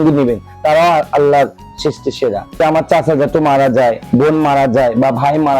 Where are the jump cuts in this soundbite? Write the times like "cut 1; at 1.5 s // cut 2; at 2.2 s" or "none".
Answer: cut 1; at 2.4 s